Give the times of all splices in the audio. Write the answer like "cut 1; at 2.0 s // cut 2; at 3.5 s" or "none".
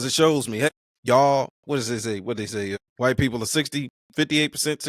cut 1; at 0.7 s // cut 2; at 2.8 s // cut 3; at 4.0 s

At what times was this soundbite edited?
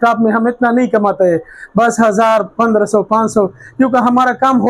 none

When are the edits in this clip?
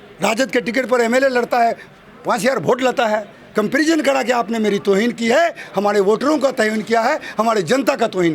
cut 1; at 3.4 s

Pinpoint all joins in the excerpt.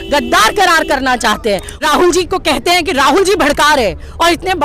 cut 1; at 1.7 s

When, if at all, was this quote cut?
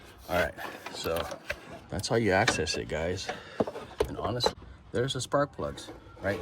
cut 1; at 4.5 s

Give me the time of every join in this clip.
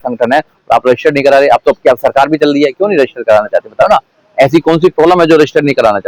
none

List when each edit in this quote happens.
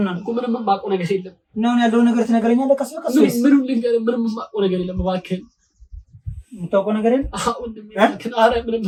none

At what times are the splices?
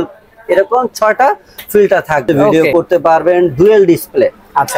cut 1; at 2.4 s

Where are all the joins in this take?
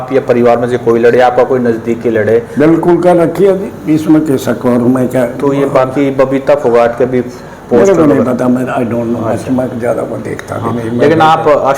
none

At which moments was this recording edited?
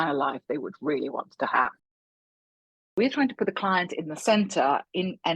cut 1; at 2.4 s

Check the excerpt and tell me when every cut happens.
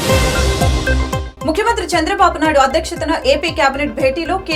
cut 1; at 1.0 s

